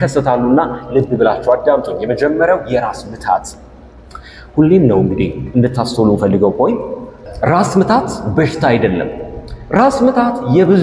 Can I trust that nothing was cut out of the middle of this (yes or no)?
yes